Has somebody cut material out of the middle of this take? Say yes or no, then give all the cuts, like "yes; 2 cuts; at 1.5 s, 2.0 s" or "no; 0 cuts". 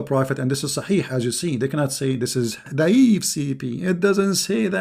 yes; 1 cut; at 2.6 s